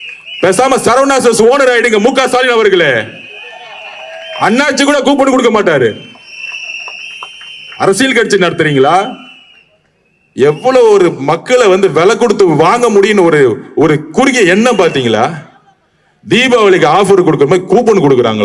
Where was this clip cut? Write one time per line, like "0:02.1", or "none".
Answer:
none